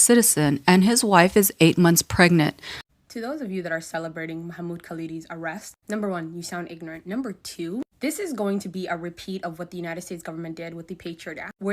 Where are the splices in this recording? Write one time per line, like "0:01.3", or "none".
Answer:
0:02.7